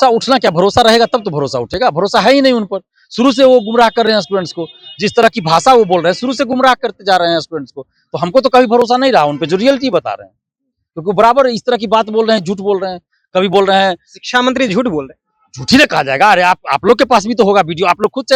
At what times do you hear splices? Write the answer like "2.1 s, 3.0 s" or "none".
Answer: none